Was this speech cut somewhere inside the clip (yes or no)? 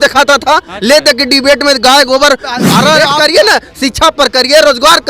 yes